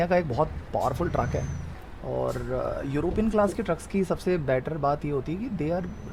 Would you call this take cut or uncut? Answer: uncut